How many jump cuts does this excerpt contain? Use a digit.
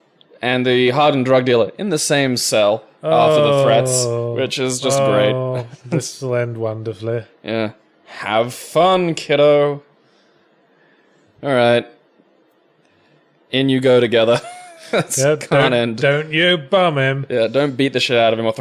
0